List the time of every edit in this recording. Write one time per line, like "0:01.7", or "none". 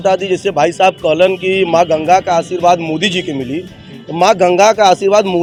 none